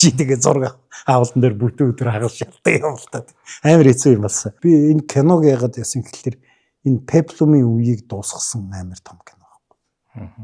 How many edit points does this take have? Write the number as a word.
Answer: one